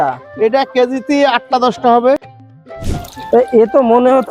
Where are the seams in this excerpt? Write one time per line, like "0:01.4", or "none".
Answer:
0:02.2